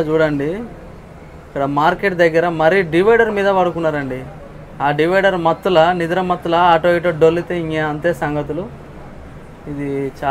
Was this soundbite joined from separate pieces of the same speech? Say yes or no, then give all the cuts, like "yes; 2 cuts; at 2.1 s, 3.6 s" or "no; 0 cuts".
no; 0 cuts